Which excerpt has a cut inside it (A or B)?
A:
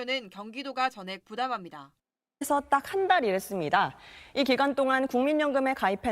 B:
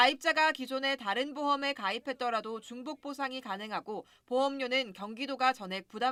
A